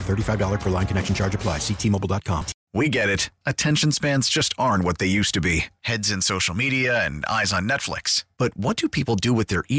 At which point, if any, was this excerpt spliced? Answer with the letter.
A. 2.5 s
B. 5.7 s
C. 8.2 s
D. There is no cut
A